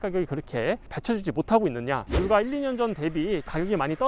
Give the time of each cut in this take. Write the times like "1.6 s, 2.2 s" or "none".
2.1 s